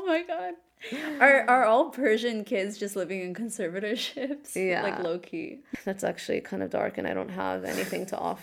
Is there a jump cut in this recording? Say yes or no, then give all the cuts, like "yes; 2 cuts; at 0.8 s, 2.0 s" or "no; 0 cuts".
yes; 1 cut; at 5.7 s